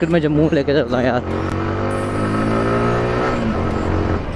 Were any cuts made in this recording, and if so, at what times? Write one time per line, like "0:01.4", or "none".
none